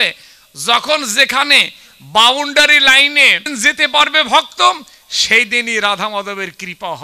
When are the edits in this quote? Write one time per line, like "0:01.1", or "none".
0:03.5